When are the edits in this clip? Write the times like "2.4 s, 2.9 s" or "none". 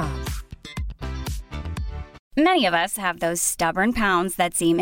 2.2 s